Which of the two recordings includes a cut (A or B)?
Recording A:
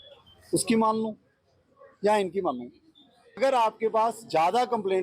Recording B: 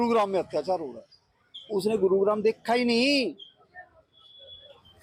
A